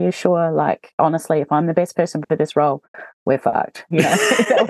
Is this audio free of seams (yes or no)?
no